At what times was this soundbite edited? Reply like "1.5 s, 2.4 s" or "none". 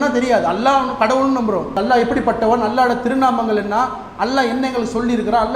1.8 s